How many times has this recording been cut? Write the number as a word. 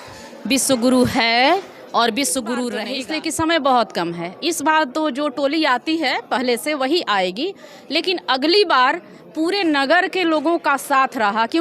one